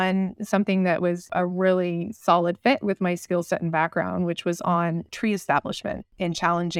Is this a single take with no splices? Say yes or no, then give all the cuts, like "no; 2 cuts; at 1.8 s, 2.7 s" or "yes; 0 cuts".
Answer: no; 1 cut; at 5.1 s